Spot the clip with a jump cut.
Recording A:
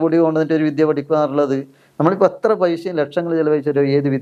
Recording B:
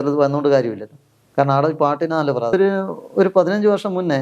B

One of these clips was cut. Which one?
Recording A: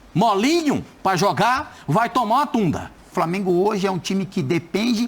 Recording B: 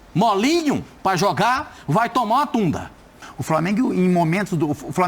A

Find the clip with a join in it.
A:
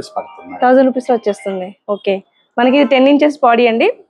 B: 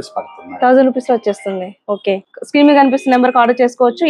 B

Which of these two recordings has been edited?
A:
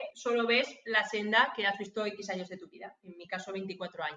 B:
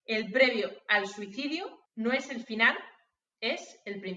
B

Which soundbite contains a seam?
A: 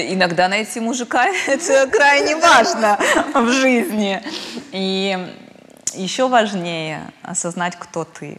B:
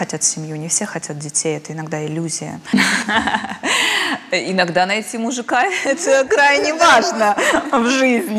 B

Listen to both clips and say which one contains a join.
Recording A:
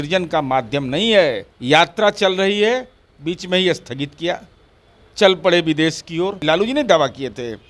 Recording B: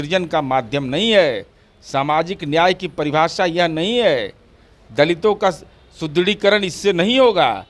A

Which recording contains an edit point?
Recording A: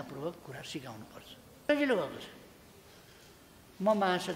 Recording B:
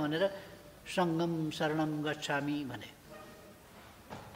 A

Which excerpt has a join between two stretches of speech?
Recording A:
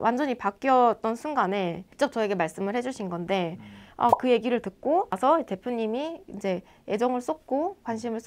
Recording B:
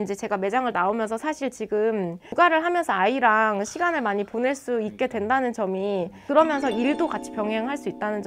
A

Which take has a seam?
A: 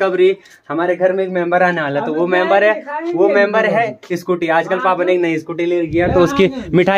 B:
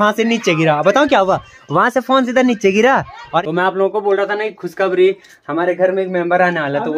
B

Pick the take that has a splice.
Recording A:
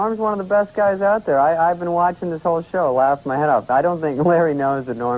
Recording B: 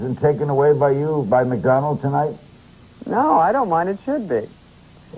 B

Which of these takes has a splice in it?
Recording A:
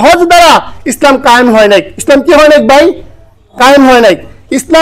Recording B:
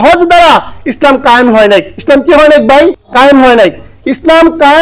B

